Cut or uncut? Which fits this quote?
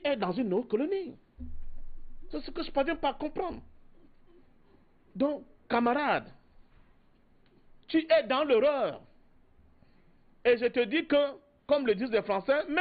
uncut